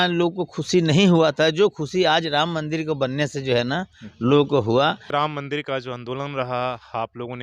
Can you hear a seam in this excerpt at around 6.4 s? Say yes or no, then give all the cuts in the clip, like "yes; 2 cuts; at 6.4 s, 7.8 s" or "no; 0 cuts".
no; 1 cut; at 5.0 s